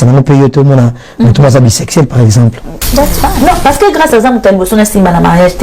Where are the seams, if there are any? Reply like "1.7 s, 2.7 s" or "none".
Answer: 3.3 s

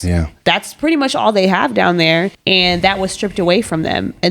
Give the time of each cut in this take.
2.4 s

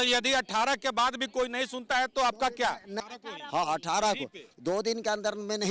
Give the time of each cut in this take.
2.9 s

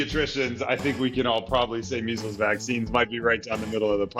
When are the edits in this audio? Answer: none

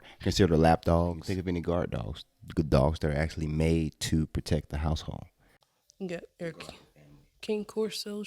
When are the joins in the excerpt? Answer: 1.2 s

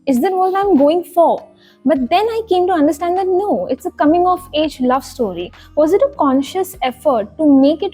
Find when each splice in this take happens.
none

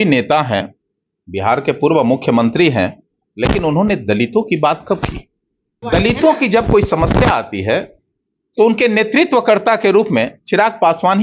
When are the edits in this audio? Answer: 5.8 s

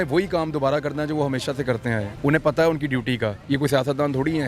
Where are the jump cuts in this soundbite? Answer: 2.1 s, 3.4 s

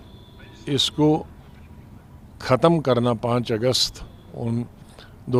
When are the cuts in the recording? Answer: none

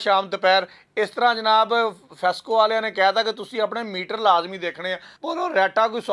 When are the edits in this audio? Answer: 5.1 s

